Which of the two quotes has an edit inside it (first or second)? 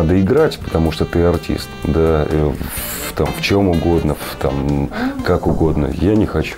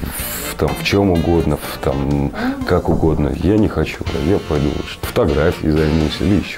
second